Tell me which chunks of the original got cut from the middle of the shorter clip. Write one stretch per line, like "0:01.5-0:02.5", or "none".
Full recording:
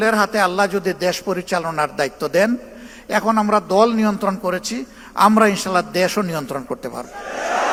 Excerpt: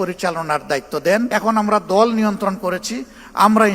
0:02.6-0:03.1